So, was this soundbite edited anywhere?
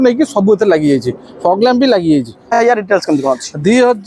yes; 1 cut; at 2.6 s

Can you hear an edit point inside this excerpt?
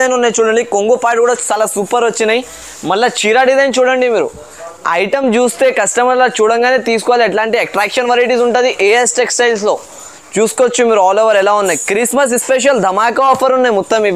no; 0 cuts

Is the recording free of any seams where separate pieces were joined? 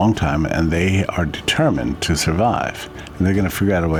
yes; 0 cuts

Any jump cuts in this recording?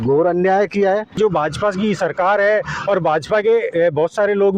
yes; 1 cut; at 1.1 s

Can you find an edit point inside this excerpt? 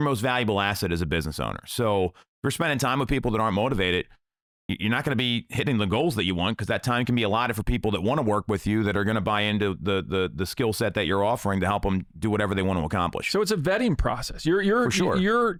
no; 0 cuts

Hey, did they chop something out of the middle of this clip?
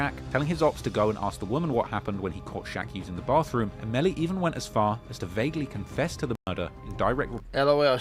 no; 0 cuts

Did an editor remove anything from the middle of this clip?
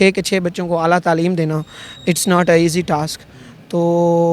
no; 0 cuts

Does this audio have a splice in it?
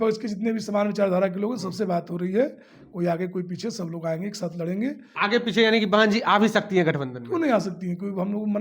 yes; 1 cut; at 5.1 s

